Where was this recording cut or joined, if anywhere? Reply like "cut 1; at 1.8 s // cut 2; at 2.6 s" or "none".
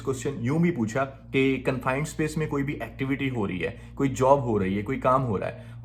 none